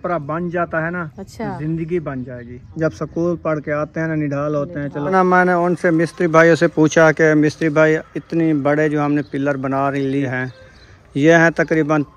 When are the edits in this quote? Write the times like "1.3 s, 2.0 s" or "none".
1.2 s, 2.6 s, 5.1 s, 10.2 s